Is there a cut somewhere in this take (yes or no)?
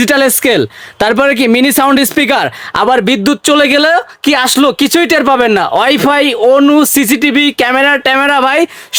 no